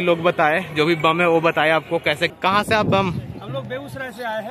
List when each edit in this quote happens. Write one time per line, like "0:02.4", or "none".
0:02.3

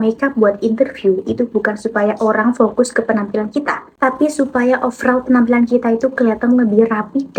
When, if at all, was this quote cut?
none

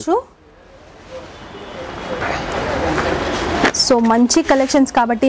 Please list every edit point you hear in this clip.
none

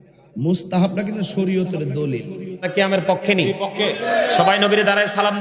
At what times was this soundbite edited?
0:02.5

